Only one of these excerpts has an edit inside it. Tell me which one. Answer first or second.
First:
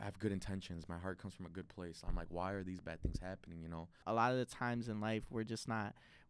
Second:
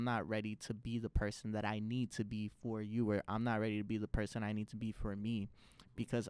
first